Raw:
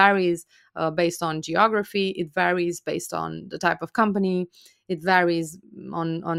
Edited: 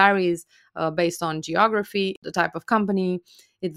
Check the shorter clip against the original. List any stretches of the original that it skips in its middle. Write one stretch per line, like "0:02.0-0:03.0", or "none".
0:02.2-0:03.5